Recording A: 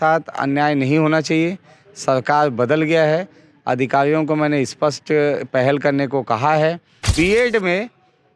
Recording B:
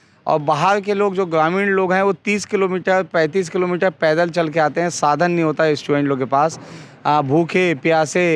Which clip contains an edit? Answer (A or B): A